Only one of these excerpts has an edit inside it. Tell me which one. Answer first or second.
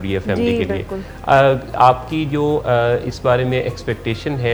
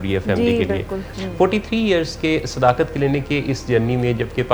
second